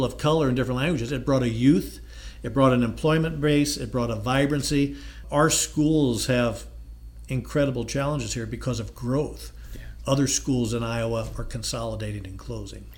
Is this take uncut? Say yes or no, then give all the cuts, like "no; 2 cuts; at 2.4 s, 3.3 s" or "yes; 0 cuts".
yes; 0 cuts